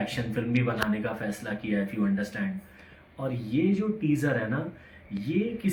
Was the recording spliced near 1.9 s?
no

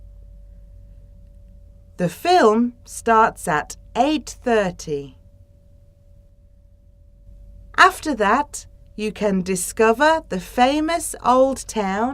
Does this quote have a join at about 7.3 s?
yes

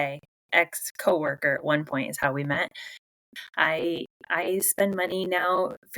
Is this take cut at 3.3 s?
yes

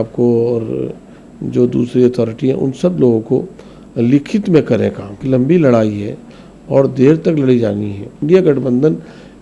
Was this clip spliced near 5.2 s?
yes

